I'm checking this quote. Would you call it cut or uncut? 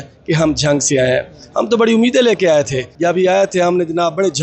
cut